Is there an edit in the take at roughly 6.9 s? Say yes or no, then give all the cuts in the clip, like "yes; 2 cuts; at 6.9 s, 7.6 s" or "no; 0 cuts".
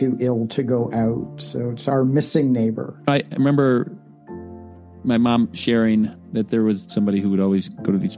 yes; 1 cut; at 6.9 s